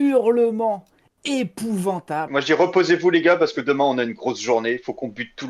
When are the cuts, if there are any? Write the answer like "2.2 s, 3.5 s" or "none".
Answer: 2.3 s